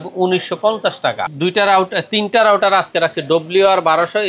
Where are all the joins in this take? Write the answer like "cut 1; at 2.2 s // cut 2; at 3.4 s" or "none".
cut 1; at 1.3 s